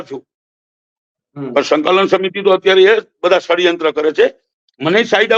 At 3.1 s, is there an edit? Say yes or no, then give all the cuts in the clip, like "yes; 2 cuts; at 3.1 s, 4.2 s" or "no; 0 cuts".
no; 0 cuts